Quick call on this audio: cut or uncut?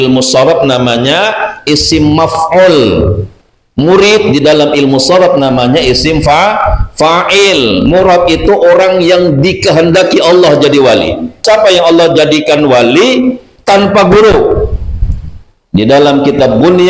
cut